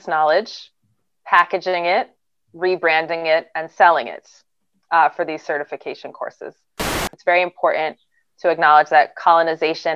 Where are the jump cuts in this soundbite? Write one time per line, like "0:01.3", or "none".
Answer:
0:07.0